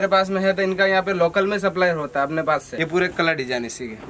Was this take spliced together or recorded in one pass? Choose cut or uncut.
cut